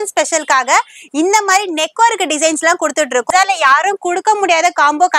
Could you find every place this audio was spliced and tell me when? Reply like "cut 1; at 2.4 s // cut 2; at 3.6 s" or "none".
cut 1; at 3.3 s